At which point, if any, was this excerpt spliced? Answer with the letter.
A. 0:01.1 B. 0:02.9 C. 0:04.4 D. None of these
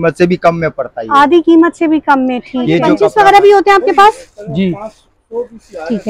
B